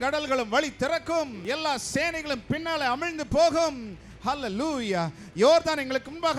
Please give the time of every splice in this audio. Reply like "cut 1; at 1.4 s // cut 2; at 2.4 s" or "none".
cut 1; at 1.4 s